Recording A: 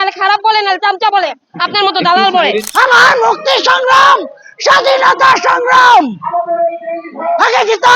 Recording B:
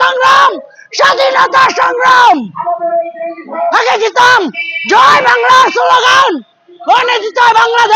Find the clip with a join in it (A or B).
A